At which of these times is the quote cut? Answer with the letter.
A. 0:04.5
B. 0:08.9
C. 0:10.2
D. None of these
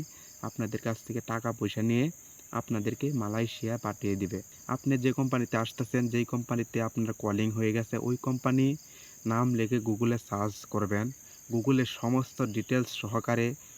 A